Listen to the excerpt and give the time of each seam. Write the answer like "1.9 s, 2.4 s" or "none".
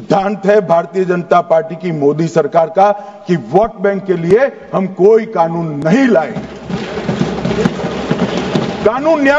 none